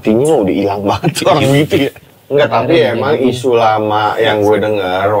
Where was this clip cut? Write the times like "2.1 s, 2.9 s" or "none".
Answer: 2.1 s